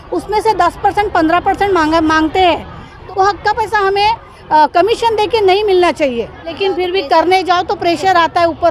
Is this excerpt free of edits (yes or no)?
no